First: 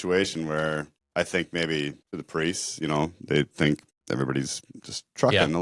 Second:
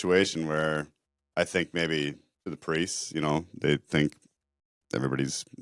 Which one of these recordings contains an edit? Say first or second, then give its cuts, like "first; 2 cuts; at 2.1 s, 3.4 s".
first; 3 cuts; at 1.0 s, 2.1 s, 3.9 s